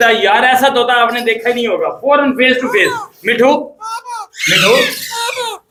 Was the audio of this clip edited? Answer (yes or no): no